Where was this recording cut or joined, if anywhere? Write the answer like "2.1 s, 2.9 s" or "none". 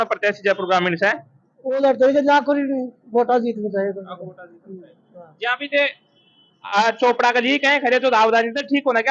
none